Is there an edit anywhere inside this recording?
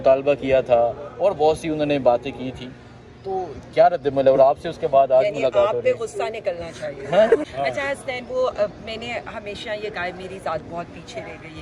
yes; 1 cut; at 7.5 s

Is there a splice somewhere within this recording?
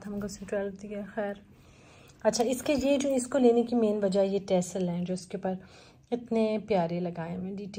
no; 0 cuts

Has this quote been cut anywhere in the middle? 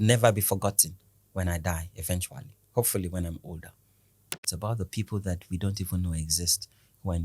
yes; 1 cut; at 4.4 s

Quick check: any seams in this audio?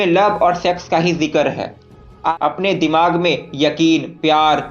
yes; 1 cut; at 2.3 s

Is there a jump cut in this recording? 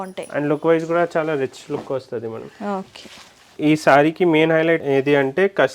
yes; 1 cut; at 3.5 s

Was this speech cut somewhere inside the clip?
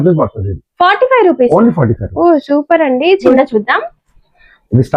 yes; 1 cut; at 3.3 s

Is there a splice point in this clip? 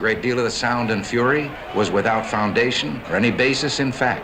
yes; 2 cuts; at 1.6 s, 2.9 s

